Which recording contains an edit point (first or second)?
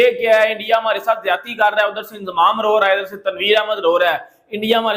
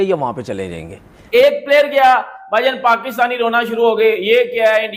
second